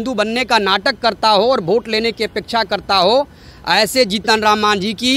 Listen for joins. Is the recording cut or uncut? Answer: uncut